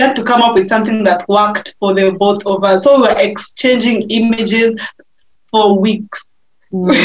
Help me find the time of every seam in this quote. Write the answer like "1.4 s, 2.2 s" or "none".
none